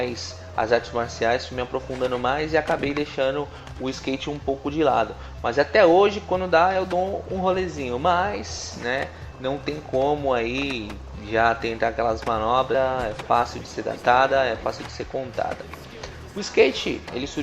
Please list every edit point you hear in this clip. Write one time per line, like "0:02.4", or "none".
none

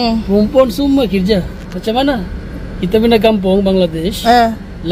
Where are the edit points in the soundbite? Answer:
none

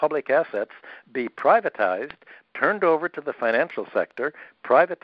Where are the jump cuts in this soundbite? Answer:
none

